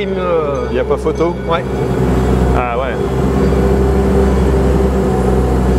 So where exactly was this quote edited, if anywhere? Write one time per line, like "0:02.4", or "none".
0:01.7